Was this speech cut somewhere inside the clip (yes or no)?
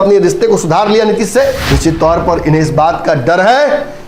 yes